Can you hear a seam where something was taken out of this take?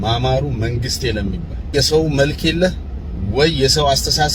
yes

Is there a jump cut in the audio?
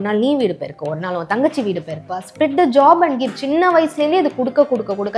no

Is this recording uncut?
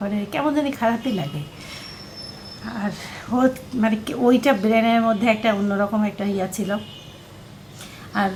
yes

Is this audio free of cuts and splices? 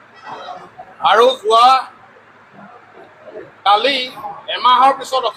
yes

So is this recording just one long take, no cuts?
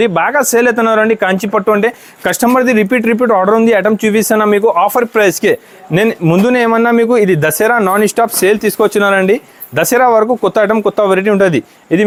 yes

